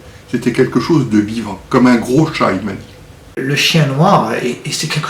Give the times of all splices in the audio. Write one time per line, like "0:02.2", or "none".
0:03.4